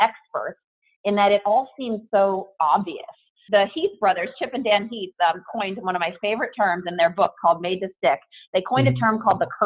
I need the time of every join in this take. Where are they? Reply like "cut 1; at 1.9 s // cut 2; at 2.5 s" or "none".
cut 1; at 3.4 s